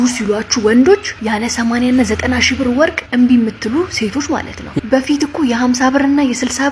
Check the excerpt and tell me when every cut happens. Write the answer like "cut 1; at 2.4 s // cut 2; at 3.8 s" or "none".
cut 1; at 1.1 s // cut 2; at 3.0 s // cut 3; at 4.8 s